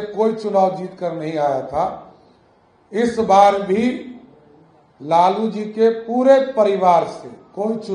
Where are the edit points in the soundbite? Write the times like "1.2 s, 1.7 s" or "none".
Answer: none